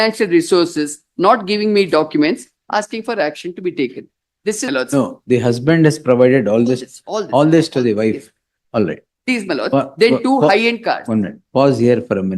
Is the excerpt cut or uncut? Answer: cut